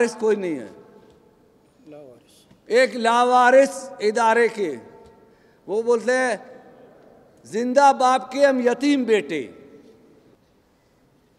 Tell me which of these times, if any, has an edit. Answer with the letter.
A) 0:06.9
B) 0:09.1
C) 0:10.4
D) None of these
C